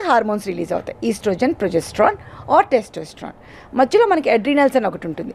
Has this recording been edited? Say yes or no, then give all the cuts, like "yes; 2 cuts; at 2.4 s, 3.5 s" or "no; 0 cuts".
no; 0 cuts